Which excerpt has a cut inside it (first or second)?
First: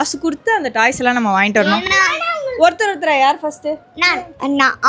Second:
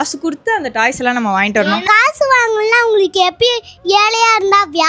second